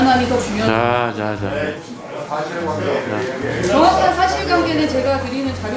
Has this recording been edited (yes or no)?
no